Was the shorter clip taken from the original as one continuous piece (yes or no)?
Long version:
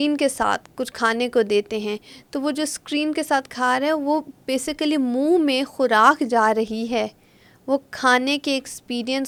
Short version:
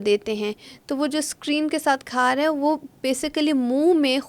yes